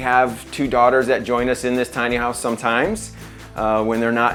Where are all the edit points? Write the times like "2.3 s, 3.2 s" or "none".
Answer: none